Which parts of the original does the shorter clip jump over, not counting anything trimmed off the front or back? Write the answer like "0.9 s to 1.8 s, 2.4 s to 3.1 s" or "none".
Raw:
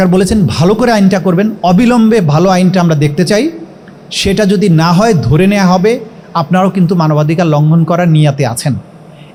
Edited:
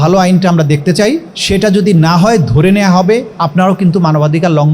3.6 s to 4.1 s, 6.1 s to 6.3 s

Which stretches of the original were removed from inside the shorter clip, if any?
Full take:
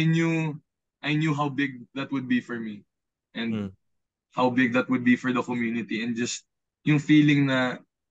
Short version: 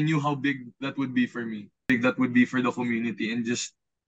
3.0 s to 4.6 s

